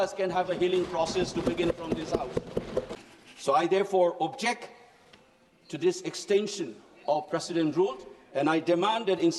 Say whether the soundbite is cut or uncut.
cut